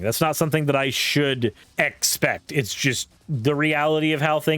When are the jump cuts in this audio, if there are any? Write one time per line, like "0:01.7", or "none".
0:01.6
0:03.1